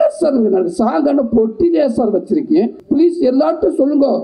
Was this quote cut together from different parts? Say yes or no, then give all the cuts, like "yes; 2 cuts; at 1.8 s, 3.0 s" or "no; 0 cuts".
yes; 1 cut; at 2.8 s